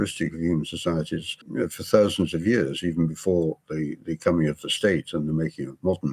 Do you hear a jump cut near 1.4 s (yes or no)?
yes